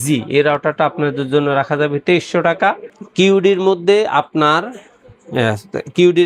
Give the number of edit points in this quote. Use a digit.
0